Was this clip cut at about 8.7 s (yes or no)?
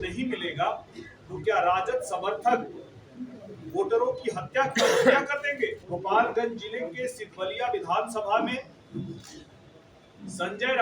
no